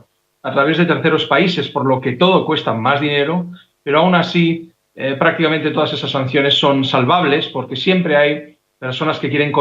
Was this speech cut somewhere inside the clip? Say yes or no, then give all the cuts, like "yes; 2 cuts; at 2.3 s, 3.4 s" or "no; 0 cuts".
yes; 1 cut; at 1.5 s